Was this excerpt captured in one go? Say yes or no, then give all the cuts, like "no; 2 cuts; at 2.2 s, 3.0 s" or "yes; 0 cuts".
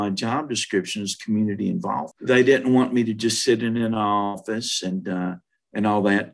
no; 1 cut; at 2.1 s